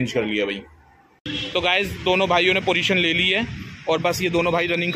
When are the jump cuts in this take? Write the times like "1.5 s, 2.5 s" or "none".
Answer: 1.3 s